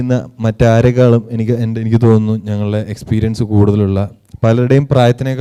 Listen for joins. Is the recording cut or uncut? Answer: uncut